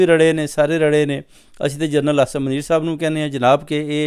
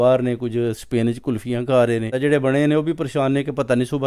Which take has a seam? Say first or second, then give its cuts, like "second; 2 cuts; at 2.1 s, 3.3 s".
second; 1 cut; at 2.1 s